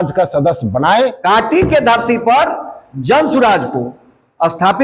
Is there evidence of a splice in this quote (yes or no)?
yes